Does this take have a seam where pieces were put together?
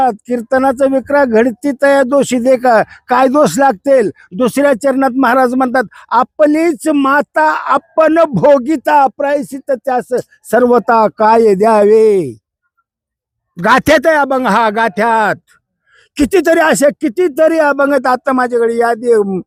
no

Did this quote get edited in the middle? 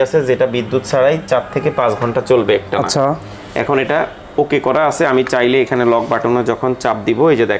no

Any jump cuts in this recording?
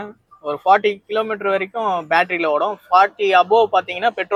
no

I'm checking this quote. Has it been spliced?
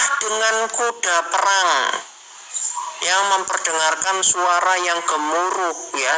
no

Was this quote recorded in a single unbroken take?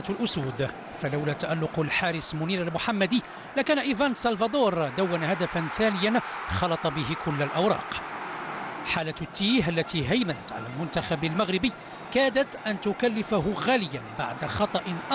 no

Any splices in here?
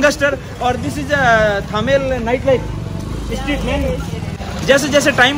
yes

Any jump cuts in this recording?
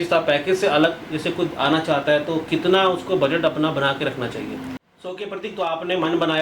yes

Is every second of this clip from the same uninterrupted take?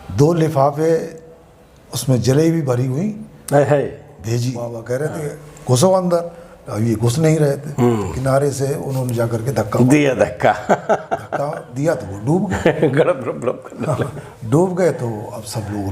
no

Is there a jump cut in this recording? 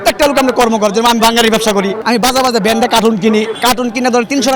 no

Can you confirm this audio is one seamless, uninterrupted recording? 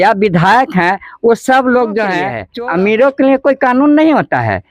no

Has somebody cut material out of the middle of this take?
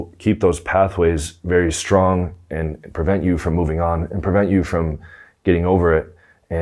no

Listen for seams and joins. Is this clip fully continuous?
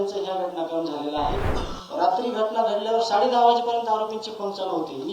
no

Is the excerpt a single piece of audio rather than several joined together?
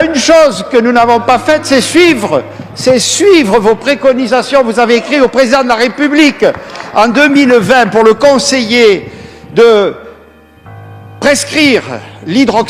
yes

